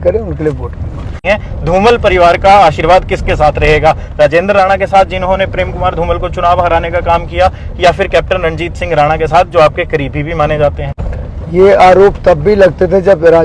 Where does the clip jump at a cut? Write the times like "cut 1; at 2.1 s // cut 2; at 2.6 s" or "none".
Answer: cut 1; at 1.2 s